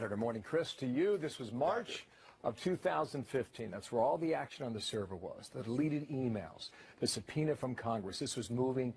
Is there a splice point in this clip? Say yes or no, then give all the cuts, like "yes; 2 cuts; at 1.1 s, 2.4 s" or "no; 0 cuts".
yes; 1 cut; at 2.9 s